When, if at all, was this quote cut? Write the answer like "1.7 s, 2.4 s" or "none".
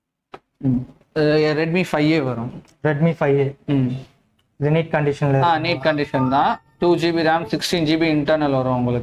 none